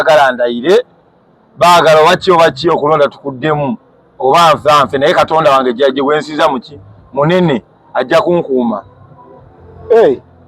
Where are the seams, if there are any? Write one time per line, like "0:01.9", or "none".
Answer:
none